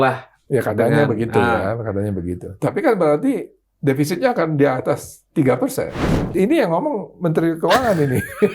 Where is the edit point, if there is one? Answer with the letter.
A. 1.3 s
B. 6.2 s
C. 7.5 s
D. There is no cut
B